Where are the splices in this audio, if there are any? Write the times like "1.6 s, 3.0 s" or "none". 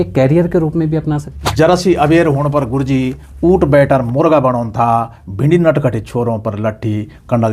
1.4 s